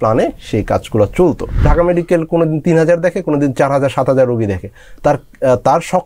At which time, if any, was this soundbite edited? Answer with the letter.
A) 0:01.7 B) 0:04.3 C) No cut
A